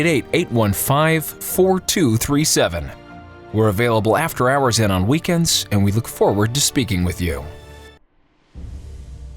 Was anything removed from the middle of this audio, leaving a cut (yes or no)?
yes